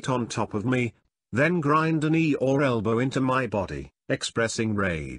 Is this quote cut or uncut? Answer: uncut